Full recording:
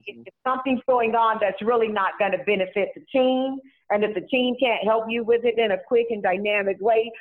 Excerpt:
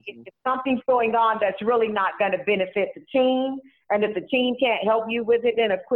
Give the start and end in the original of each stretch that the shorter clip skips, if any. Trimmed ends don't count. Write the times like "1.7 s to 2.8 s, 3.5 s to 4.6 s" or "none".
none

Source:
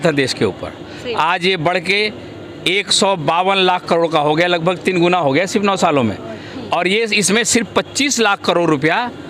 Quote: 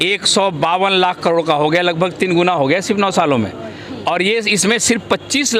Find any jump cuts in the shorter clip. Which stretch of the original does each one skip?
none

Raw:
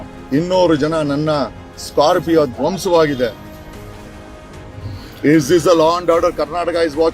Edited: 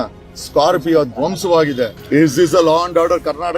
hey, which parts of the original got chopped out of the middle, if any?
3.4 s to 5.1 s

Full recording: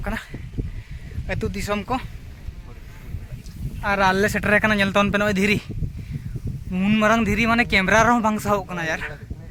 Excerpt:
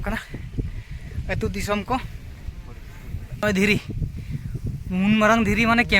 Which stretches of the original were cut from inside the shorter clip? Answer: 3.4 s to 5.2 s

